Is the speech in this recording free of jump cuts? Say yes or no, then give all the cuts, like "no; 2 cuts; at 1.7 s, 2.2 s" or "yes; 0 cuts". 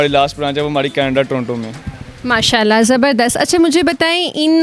yes; 0 cuts